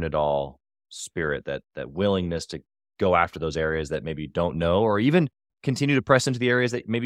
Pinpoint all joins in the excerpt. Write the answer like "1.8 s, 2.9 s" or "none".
none